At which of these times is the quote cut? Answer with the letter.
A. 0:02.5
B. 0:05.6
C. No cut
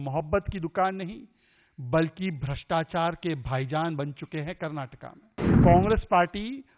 B